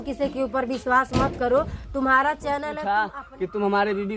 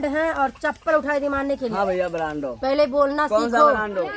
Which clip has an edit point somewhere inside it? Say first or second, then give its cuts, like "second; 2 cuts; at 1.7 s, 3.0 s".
first; 1 cut; at 2.7 s